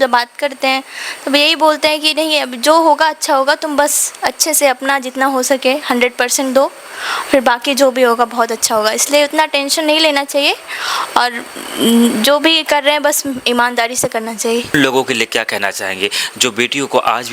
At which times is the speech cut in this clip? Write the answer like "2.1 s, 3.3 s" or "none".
14.7 s

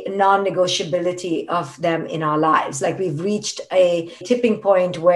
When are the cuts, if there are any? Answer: 4.2 s

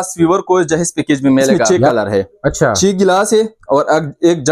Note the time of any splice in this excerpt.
1.7 s

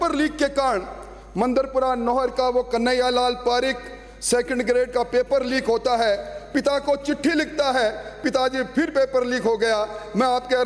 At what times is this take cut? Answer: none

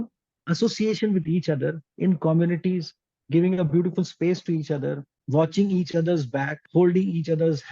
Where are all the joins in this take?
5.1 s, 6.6 s

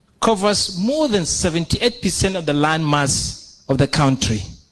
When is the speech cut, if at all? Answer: none

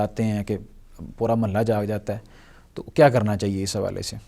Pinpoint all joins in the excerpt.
none

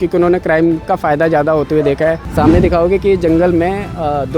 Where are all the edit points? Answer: 2.3 s

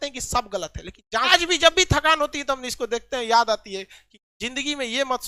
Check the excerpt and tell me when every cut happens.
1.3 s

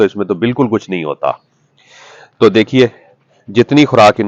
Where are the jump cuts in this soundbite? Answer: none

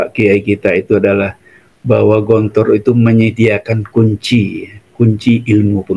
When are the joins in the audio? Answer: none

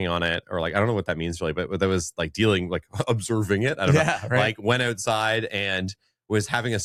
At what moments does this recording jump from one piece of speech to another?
none

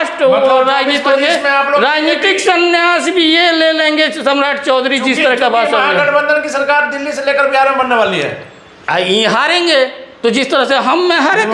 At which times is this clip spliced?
none

